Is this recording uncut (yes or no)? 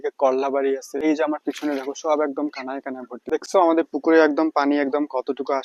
no